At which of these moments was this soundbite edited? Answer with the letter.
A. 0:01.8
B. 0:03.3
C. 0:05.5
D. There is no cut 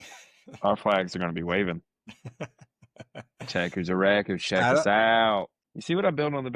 C